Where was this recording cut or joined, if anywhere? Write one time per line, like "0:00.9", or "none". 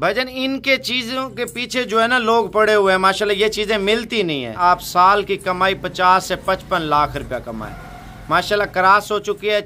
0:04.5